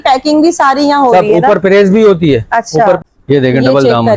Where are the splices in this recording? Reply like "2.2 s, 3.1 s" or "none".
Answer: 3.0 s